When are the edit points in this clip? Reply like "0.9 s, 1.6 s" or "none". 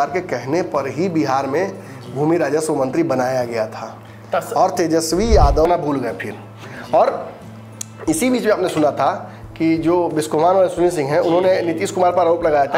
5.7 s